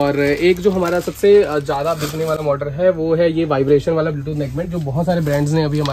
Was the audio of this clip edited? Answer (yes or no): no